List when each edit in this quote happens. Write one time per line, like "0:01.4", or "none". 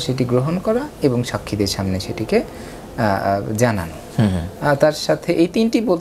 none